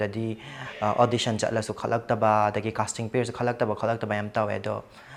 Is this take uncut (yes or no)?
yes